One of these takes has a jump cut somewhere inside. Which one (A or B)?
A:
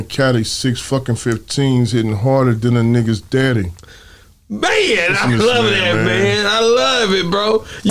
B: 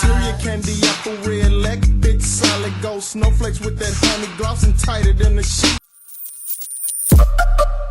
B